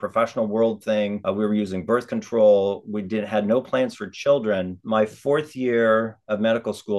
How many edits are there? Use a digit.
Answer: 2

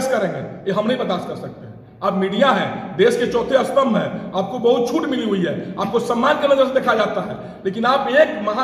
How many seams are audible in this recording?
0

